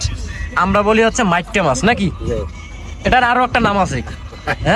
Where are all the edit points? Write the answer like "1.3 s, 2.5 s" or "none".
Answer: none